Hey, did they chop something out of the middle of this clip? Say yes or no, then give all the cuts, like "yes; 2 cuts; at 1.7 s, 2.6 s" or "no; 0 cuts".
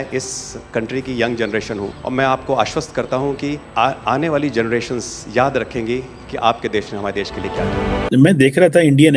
yes; 1 cut; at 8.1 s